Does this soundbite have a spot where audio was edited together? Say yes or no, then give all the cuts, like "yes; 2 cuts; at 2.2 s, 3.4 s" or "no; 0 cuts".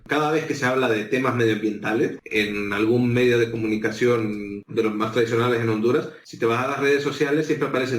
yes; 1 cut; at 2.2 s